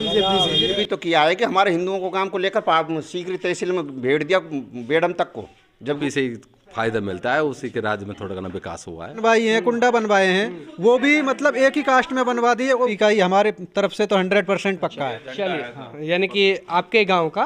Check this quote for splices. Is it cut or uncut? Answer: cut